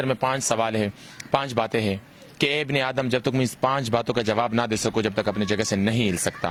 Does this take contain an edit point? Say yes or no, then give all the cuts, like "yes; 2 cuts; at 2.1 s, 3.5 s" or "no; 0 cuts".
no; 0 cuts